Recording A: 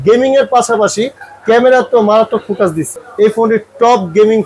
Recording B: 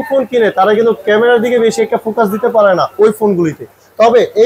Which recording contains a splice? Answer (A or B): A